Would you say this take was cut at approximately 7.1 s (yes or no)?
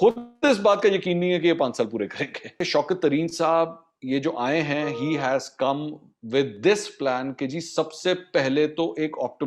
no